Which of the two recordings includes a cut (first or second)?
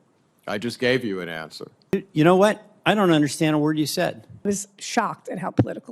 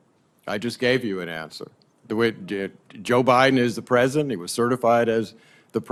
first